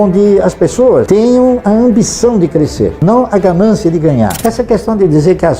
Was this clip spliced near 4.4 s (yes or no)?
yes